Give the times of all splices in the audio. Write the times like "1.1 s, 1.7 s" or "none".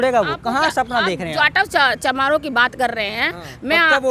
none

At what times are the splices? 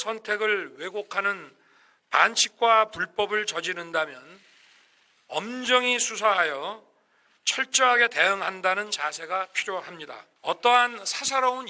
10.3 s

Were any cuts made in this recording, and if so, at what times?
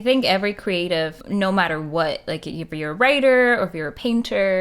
1.2 s

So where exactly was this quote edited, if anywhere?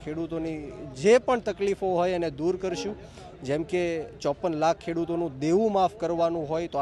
none

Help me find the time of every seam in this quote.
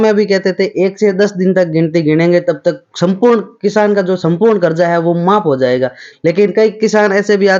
none

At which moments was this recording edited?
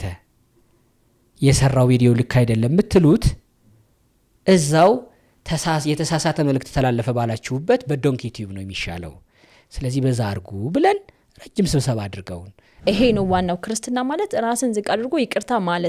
12.9 s

